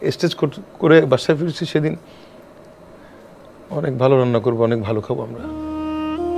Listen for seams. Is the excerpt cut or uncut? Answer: uncut